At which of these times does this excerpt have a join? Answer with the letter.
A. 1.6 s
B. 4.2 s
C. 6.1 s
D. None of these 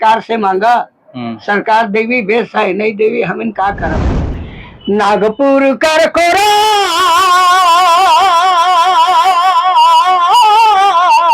B